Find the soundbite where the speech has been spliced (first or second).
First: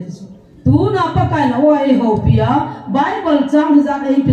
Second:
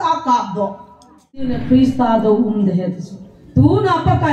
second